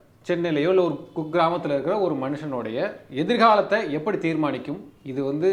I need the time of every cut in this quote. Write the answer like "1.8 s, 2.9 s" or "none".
none